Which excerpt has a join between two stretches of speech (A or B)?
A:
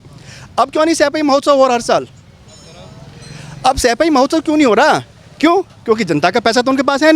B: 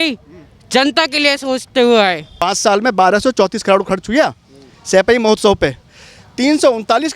B